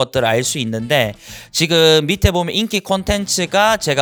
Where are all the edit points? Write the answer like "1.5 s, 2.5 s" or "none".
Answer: none